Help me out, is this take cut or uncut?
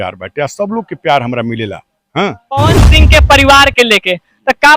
cut